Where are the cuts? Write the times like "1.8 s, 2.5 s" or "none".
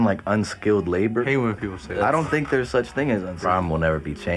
1.3 s, 3.4 s